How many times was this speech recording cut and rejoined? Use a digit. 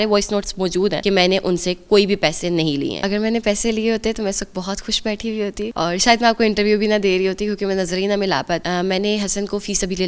4